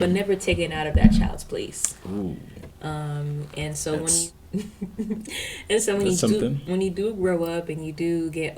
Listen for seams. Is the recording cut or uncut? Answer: cut